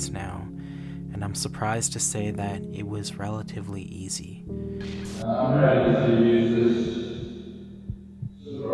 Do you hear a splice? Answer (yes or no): yes